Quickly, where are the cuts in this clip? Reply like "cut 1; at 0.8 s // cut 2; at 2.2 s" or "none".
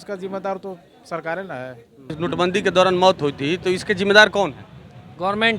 cut 1; at 2.2 s

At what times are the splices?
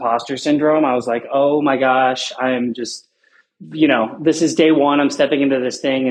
none

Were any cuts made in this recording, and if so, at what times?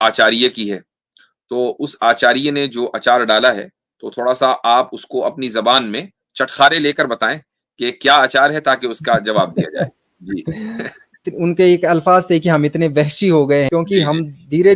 cut 1; at 11.3 s // cut 2; at 13.7 s

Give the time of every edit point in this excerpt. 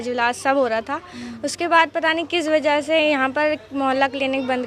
none

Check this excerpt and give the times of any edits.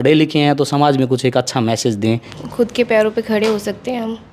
cut 1; at 2.4 s

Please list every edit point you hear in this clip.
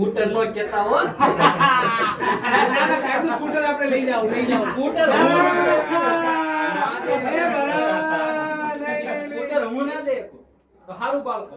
none

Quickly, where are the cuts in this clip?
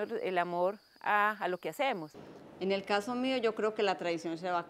cut 1; at 2.1 s

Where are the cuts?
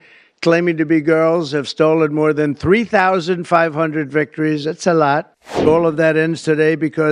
cut 1; at 5.7 s

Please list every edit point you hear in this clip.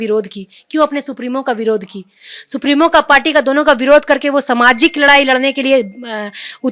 none

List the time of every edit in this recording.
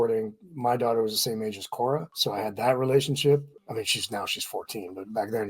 cut 1; at 2.1 s // cut 2; at 3.5 s

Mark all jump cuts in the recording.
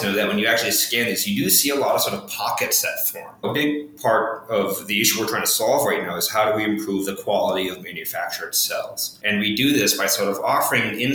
cut 1; at 3.4 s // cut 2; at 9.1 s

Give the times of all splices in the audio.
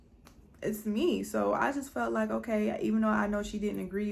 none

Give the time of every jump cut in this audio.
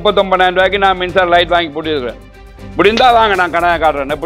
none

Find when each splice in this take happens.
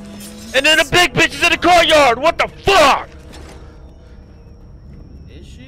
none

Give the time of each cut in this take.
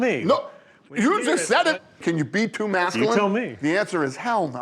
cut 1; at 1.9 s // cut 2; at 3.5 s

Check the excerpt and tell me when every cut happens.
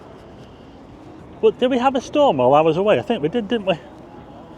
cut 1; at 1.2 s

